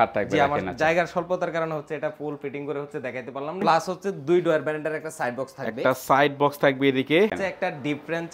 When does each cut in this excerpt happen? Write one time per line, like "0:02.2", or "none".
0:03.6
0:07.3